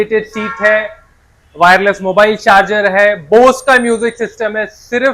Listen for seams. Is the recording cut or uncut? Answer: uncut